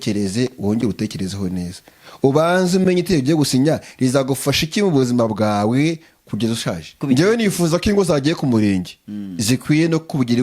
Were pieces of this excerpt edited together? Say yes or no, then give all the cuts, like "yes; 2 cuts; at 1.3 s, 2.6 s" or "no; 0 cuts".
yes; 1 cut; at 6.9 s